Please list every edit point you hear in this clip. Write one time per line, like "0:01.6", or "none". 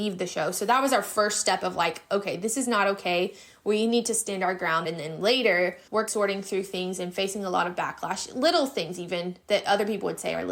0:04.8
0:06.1